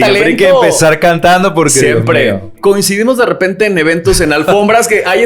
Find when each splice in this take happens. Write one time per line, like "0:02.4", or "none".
0:02.5